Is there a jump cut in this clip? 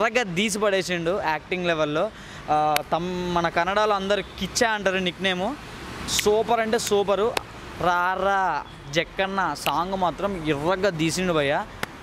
no; 0 cuts

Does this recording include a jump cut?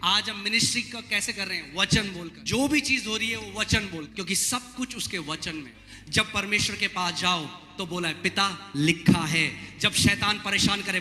yes; 3 cuts; at 2.3 s, 4.1 s, 5.8 s

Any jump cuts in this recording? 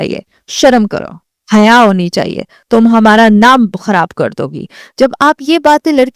no; 0 cuts

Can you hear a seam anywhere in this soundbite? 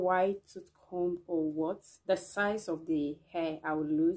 yes; 1 cut; at 1.9 s

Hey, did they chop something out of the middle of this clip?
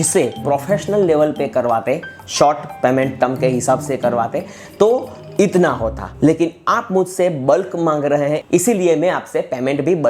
no; 0 cuts

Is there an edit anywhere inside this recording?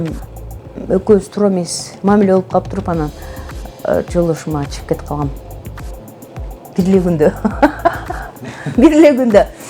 no; 0 cuts

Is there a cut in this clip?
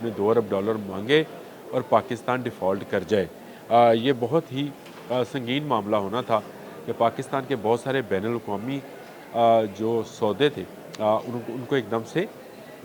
no; 0 cuts

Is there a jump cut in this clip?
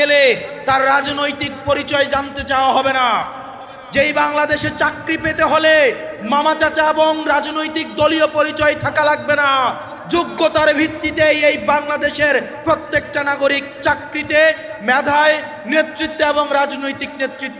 no; 0 cuts

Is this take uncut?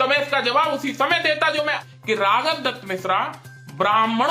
no; 1 cut; at 1.8 s

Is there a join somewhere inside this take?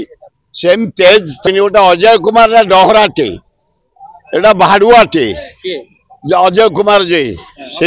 yes; 1 cut; at 1.4 s

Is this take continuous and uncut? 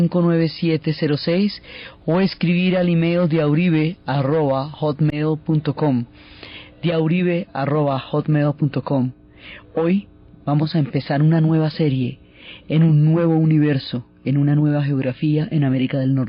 yes; 0 cuts

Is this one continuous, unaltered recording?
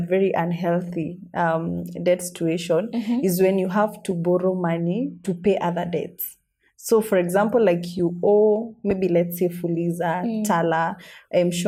yes; 0 cuts

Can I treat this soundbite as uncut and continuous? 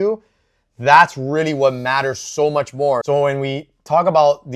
yes; 0 cuts

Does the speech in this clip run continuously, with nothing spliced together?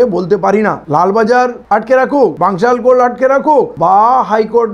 no; 3 cuts; at 0.8 s, 2.3 s, 3.7 s

